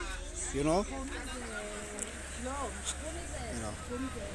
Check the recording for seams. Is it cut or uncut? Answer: uncut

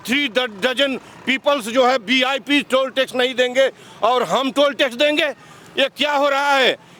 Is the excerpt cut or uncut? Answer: uncut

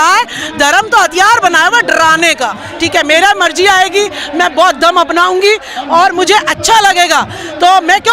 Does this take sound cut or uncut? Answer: cut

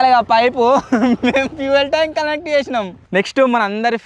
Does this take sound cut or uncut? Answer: cut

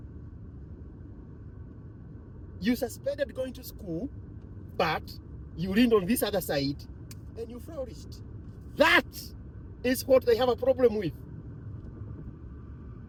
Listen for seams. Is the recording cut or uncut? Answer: uncut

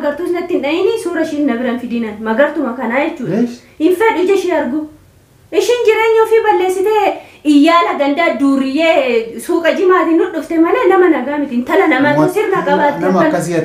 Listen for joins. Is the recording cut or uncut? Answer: uncut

